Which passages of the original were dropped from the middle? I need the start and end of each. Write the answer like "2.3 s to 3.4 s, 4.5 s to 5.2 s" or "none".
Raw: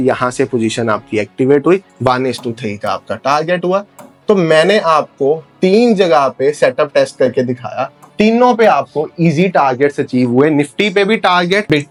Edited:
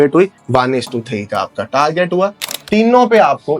4.0 s to 8.0 s